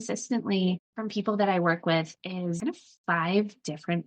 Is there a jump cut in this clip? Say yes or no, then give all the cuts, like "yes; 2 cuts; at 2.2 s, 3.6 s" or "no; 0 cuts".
yes; 2 cuts; at 0.9 s, 2.6 s